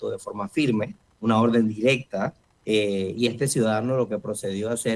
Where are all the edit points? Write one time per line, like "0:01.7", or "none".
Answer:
0:01.0
0:02.5